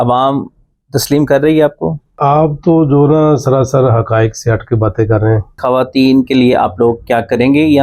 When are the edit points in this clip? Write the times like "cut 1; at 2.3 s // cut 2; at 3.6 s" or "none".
cut 1; at 2.2 s // cut 2; at 5.5 s